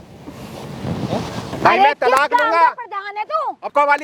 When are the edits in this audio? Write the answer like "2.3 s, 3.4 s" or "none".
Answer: 1.5 s